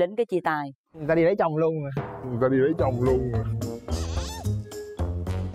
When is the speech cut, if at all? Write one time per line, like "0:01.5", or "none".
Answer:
none

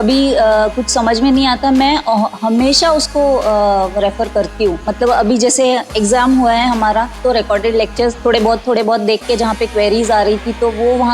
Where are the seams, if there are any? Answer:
0:04.9
0:07.2
0:08.2

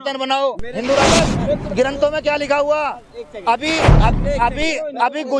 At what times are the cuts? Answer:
0:01.1

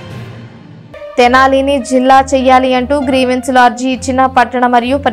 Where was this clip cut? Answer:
0:01.1

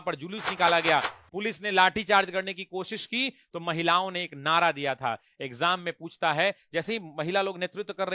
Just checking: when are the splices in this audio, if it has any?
none

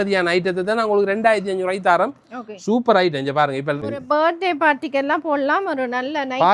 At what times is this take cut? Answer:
0:03.9

